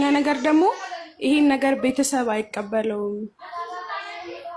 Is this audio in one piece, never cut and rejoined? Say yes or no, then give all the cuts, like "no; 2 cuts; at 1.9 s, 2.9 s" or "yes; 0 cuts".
yes; 0 cuts